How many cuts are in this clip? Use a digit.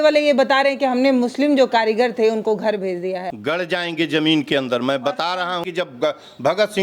2